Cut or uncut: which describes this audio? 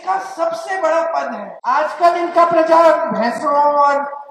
cut